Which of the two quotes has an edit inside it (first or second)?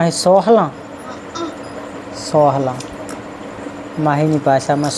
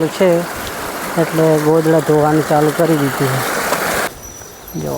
second